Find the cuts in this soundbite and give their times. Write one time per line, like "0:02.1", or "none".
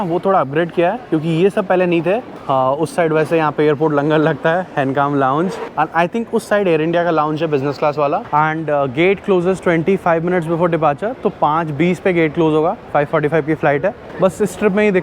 none

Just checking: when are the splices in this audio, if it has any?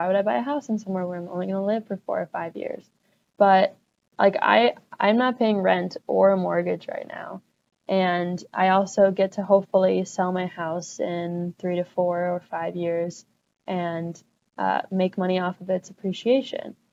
none

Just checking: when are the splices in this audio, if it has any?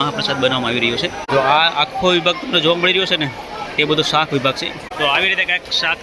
0:01.3
0:04.9

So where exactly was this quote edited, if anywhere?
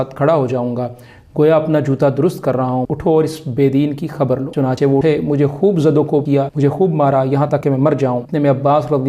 0:02.8
0:04.8
0:06.3
0:07.8

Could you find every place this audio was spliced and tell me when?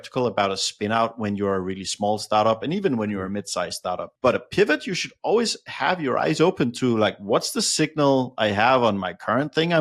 none

